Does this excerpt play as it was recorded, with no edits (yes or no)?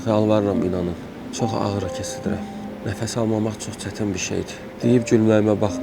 no